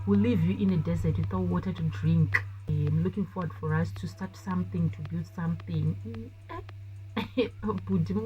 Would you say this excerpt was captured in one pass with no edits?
no; 1 cut; at 2.7 s

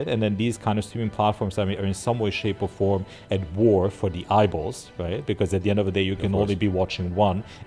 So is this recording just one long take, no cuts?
yes; 0 cuts

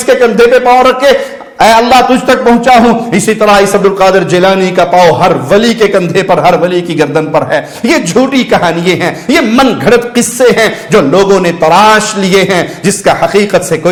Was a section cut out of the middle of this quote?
no; 0 cuts

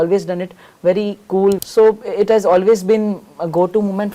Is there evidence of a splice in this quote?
yes; 1 cut; at 1.6 s

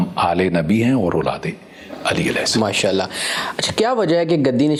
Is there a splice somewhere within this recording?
no; 0 cuts

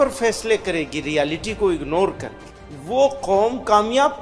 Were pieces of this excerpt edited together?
no; 0 cuts

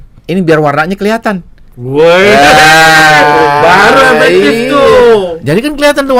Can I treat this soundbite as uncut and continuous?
yes; 0 cuts

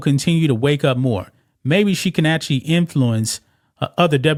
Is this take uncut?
yes; 0 cuts

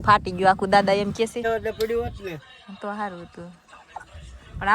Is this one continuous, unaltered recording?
no; 1 cut; at 1.5 s

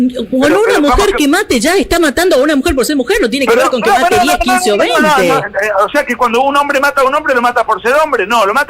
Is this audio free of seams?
yes; 0 cuts

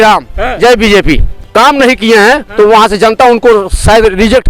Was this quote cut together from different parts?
yes; 1 cut; at 1.3 s

